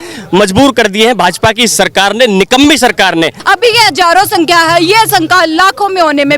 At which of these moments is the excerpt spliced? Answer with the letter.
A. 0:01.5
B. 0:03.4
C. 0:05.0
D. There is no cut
B